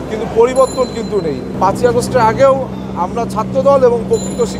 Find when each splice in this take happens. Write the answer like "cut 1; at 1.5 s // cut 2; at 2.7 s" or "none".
cut 1; at 1.5 s